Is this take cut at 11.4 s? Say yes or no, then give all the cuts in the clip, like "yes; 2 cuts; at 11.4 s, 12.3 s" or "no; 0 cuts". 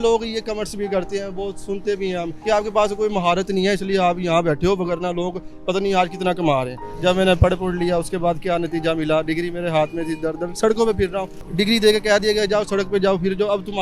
yes; 3 cuts; at 2.3 s, 6.9 s, 11.4 s